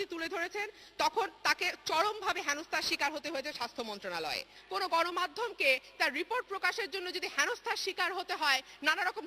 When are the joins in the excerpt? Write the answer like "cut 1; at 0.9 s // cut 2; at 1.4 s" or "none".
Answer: cut 1; at 4.6 s